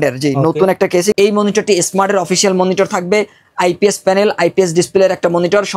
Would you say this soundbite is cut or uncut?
cut